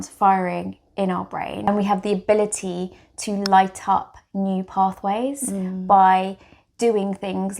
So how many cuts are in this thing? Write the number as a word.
one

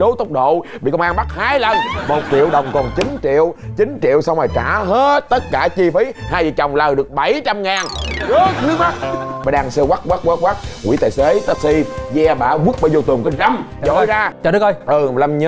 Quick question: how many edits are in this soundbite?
two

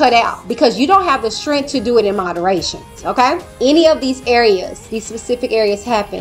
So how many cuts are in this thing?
one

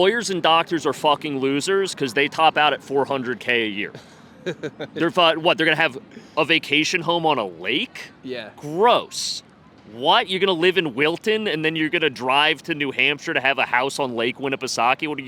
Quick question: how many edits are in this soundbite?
zero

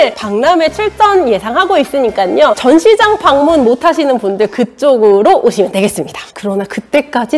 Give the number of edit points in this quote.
two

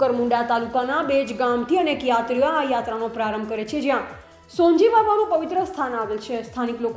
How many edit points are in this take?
zero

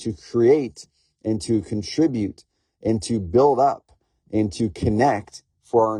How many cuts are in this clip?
zero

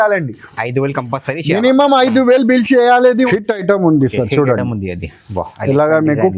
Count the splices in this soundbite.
one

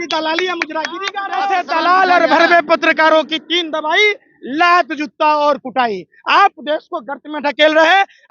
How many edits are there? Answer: one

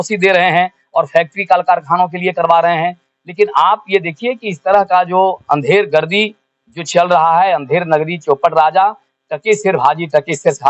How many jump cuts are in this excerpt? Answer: zero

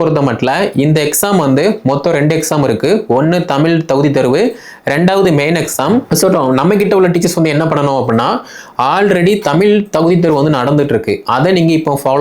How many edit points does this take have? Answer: one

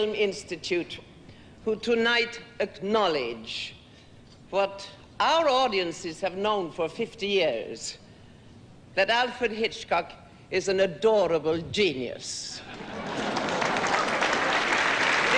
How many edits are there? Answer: zero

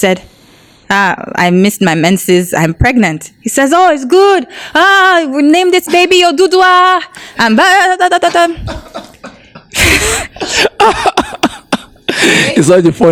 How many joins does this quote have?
zero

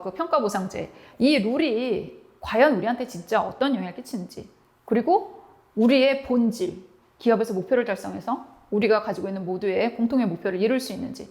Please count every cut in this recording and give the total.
one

